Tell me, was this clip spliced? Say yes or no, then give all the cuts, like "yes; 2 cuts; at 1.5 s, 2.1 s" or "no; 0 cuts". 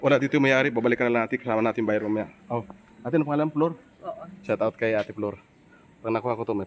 no; 0 cuts